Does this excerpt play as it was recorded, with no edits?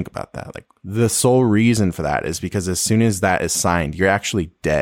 yes; 0 cuts

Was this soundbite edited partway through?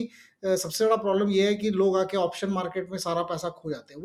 no; 0 cuts

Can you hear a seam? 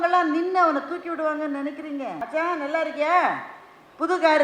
yes; 1 cut; at 2.2 s

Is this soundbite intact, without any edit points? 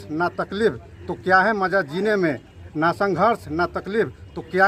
yes; 0 cuts

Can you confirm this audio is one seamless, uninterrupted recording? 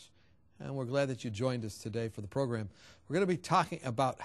no; 1 cut; at 1.5 s

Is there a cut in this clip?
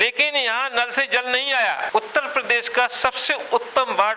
yes; 1 cut; at 1.8 s

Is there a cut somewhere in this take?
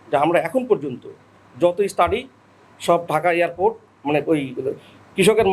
no; 0 cuts

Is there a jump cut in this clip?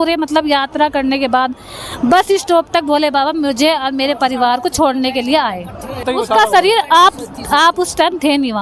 yes; 1 cut; at 6.1 s

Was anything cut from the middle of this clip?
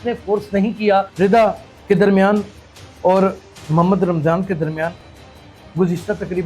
yes; 1 cut; at 1.1 s

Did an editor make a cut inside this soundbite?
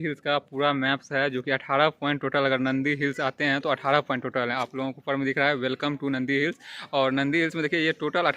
no; 0 cuts

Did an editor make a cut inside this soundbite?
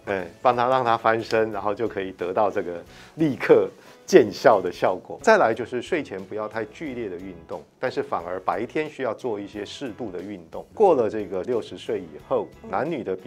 yes; 3 cuts; at 5.2 s, 10.7 s, 11.4 s

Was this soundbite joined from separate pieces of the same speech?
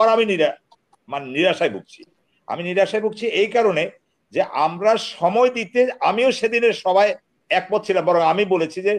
no; 0 cuts

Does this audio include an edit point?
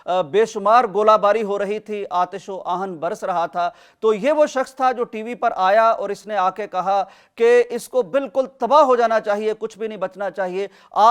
no; 0 cuts

